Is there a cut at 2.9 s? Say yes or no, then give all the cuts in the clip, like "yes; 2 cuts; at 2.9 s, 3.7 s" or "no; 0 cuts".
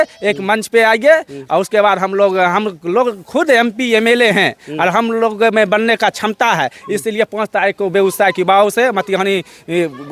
no; 0 cuts